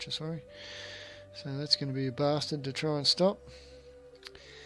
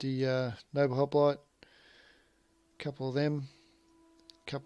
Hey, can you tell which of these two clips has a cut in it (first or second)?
second